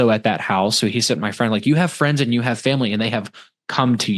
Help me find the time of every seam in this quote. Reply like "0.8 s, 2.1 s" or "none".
none